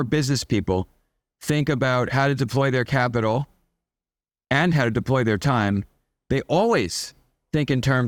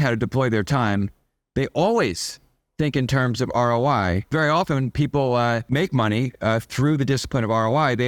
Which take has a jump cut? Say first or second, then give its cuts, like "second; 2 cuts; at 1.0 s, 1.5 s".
second; 2 cuts; at 4.3 s, 5.6 s